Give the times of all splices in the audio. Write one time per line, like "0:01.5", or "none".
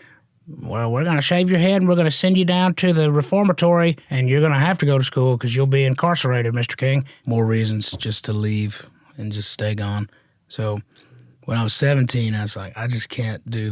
0:04.1
0:07.1

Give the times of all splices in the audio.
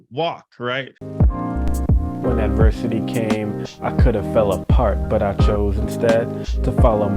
0:01.0

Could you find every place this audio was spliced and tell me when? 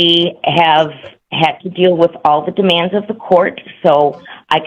none

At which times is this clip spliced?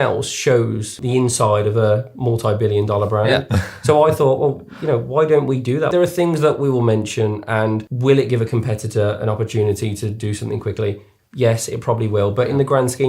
0:01.0
0:05.9
0:07.9

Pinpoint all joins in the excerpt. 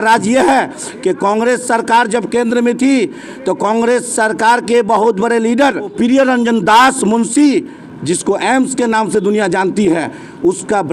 0:05.9
0:07.9

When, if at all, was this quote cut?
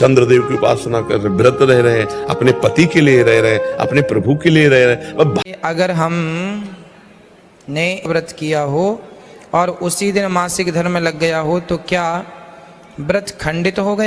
0:05.4
0:08.1

